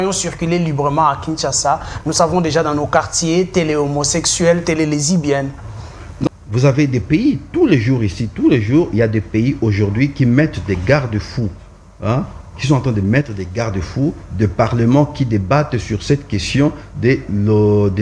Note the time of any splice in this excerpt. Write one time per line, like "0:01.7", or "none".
0:06.3

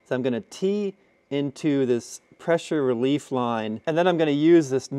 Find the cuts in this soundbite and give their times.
0:03.7

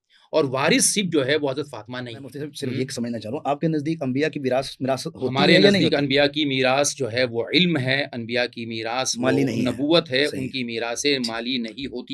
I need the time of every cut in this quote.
0:02.4

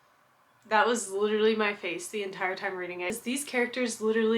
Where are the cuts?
0:03.1

